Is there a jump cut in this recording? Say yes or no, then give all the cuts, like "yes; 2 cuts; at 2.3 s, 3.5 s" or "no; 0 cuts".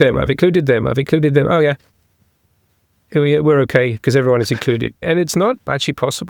no; 0 cuts